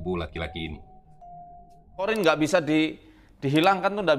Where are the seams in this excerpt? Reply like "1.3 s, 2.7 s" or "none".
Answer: 2.1 s